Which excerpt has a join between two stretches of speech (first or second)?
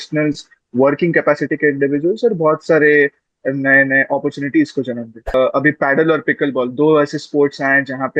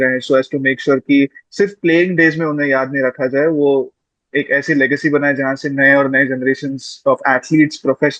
first